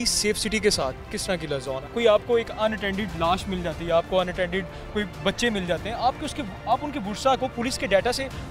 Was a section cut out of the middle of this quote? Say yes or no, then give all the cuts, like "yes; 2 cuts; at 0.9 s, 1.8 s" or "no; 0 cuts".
yes; 1 cut; at 1.8 s